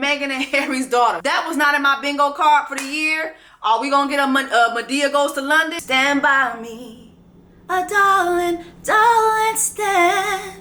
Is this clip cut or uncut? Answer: cut